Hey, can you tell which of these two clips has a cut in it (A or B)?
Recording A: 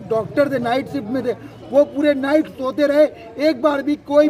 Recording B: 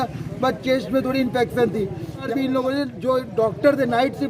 B